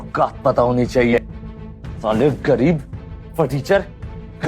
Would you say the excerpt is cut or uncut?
cut